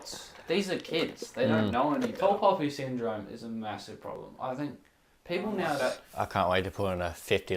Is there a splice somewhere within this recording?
yes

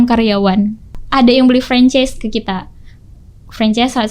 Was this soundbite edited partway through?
yes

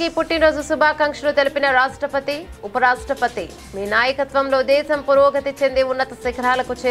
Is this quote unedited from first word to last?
yes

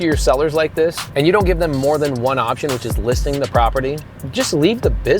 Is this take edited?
yes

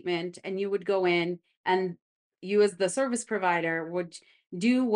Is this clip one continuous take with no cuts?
no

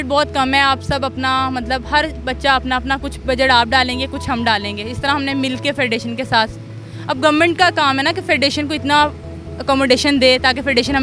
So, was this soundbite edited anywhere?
no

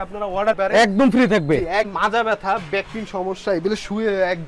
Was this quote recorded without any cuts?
no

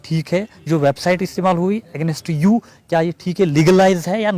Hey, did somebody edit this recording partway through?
no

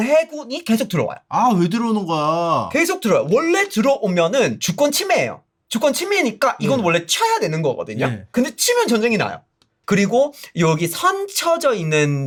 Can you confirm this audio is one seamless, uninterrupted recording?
yes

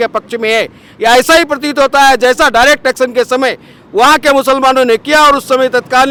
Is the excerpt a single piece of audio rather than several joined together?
yes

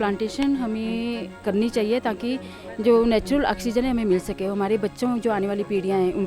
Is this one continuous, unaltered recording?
no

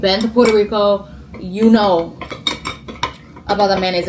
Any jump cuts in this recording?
no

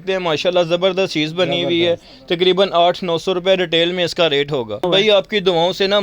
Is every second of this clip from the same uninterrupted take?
no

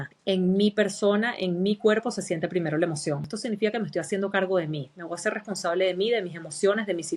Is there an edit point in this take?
yes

